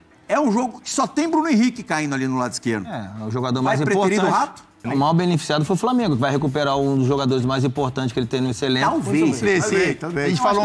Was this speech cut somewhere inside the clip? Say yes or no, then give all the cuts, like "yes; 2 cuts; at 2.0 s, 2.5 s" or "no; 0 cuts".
yes; 1 cut; at 4.9 s